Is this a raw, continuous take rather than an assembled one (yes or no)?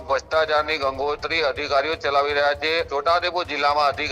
no